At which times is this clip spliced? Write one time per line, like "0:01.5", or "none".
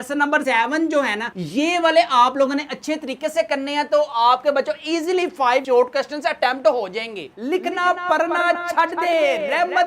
0:07.3